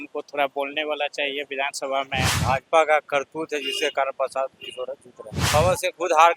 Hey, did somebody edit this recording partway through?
yes; 2 cuts; at 2.3 s, 5.4 s

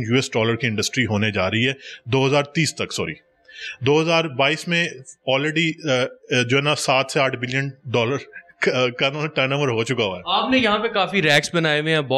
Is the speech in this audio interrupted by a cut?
no; 0 cuts

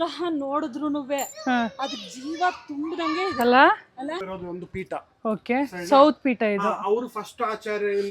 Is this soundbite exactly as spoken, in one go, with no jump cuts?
no; 1 cut; at 4.2 s

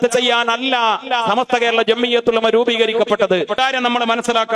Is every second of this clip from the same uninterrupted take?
no; 1 cut; at 3.6 s

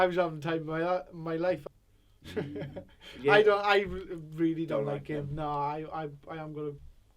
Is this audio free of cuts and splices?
no; 1 cut; at 1.6 s

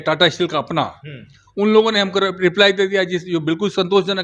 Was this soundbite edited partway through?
no; 0 cuts

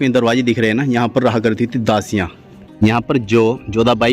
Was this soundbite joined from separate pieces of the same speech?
yes; 1 cut; at 2.6 s

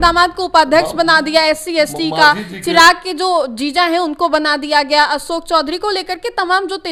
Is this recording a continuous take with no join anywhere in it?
yes; 0 cuts

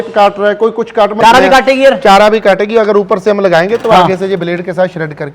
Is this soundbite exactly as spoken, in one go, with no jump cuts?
no; 1 cut; at 1.2 s

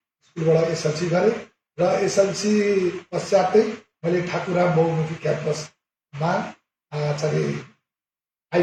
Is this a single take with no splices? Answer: yes; 0 cuts

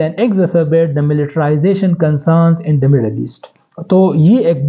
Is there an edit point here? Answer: no; 0 cuts

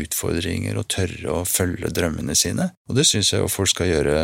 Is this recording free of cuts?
no; 1 cut; at 2.8 s

